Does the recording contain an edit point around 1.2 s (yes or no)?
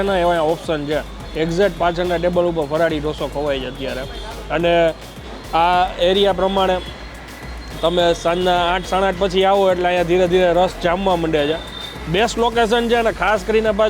no